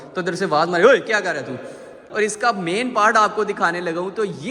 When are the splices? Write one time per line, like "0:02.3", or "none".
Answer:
0:02.0